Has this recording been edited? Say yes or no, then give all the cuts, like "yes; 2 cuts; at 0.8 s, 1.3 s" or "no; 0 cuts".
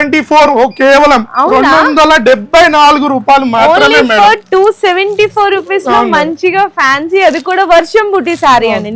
no; 0 cuts